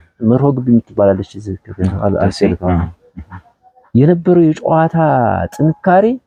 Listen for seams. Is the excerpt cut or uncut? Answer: uncut